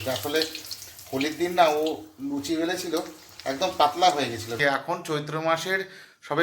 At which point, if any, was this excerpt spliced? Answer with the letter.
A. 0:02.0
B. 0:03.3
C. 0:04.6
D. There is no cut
C